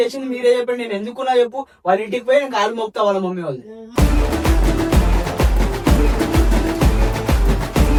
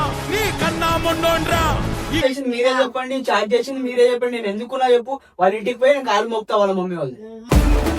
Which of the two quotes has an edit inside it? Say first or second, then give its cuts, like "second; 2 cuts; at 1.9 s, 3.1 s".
second; 1 cut; at 2.2 s